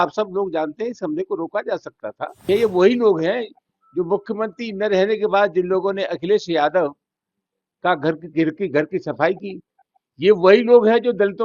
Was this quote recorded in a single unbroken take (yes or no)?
no